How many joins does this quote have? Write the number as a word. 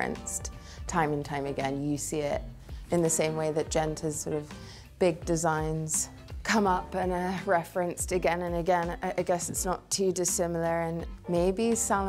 zero